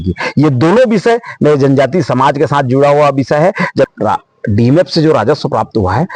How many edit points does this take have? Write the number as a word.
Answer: one